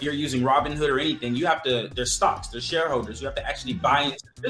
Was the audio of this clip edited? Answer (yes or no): no